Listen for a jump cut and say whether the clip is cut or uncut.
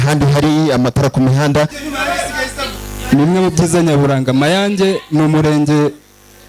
cut